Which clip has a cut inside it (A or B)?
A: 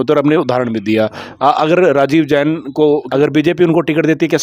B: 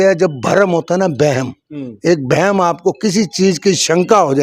A